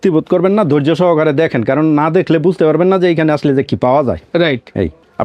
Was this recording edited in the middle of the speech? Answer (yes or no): no